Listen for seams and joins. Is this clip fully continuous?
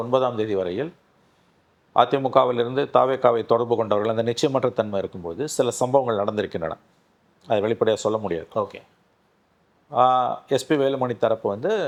yes; 0 cuts

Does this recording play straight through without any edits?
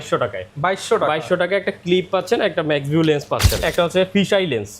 no; 1 cut; at 3.6 s

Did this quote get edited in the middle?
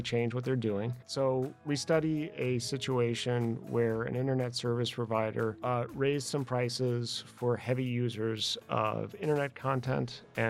yes; 1 cut; at 1.6 s

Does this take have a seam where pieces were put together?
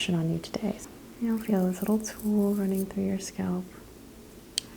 yes; 2 cuts; at 0.8 s, 3.9 s

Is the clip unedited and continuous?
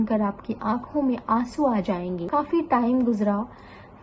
no; 1 cut; at 2.2 s

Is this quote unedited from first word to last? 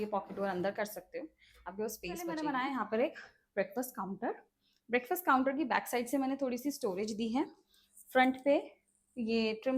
no; 1 cut; at 2.3 s

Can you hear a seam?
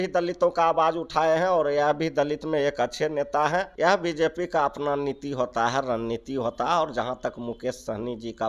yes; 1 cut; at 3.7 s

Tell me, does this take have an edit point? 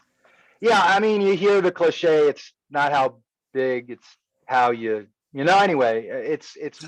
no; 0 cuts

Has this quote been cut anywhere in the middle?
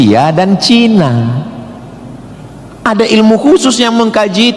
yes; 1 cut; at 1.1 s

